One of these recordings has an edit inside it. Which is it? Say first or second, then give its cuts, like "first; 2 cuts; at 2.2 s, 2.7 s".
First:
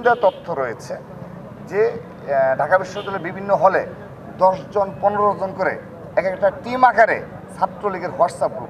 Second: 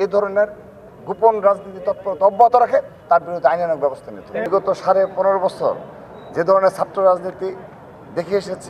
second; 1 cut; at 4.4 s